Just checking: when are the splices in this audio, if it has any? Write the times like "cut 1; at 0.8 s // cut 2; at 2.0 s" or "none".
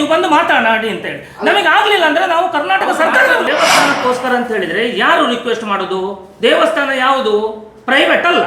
cut 1; at 3.5 s